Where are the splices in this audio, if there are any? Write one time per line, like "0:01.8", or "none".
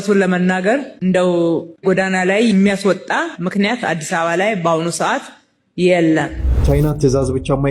0:06.6